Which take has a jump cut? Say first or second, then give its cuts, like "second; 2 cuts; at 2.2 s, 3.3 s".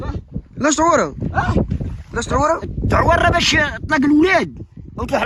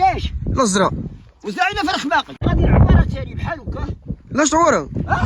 second; 1 cut; at 2.4 s